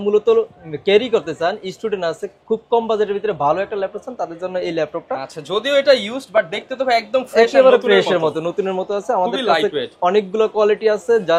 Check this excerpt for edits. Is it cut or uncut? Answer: uncut